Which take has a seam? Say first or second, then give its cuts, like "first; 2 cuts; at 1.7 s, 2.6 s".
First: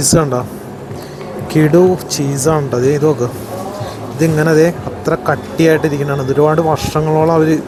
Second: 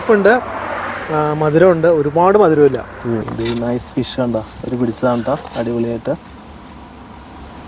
second; 1 cut; at 3.3 s